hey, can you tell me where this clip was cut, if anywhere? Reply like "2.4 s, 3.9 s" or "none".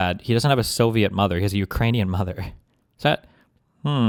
none